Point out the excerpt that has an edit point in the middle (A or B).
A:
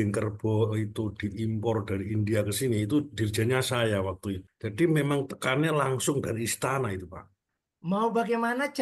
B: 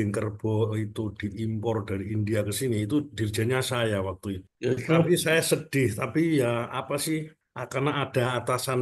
A